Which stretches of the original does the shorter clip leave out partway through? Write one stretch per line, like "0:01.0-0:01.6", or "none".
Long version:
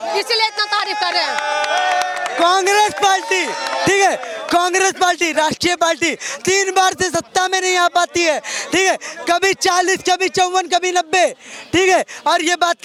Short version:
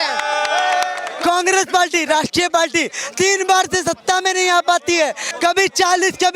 0:02.2-0:04.3
0:08.5-0:09.1